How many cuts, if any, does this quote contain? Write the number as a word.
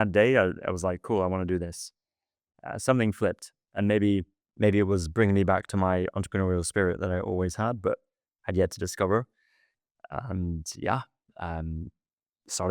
one